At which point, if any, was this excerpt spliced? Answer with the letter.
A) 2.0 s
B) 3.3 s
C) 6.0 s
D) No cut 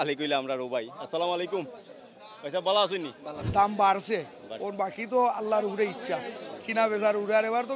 B